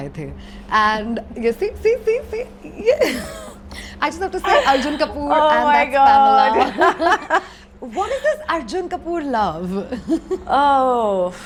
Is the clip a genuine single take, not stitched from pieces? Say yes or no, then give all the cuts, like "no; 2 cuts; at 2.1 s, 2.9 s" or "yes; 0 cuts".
yes; 0 cuts